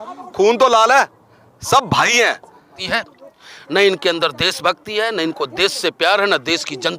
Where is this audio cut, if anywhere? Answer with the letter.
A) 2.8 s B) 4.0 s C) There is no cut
A